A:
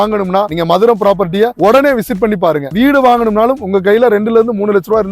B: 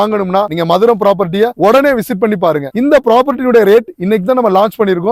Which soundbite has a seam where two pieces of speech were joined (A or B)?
A